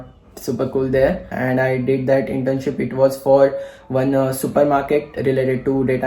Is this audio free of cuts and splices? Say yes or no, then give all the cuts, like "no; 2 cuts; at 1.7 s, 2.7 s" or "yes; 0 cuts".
no; 2 cuts; at 1.3 s, 5.2 s